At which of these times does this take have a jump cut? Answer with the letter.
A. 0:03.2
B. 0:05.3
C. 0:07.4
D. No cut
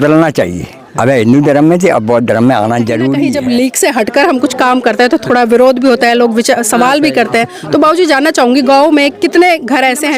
A